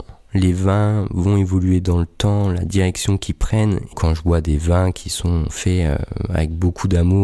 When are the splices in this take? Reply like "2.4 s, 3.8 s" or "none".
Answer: 3.9 s, 5.6 s